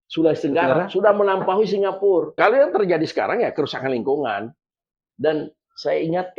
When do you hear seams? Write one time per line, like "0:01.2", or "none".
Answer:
0:02.3
0:05.0